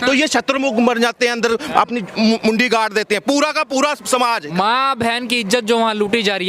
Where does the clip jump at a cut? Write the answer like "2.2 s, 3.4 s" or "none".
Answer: 4.5 s